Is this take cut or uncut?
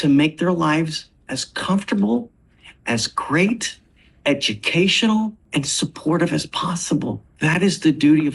cut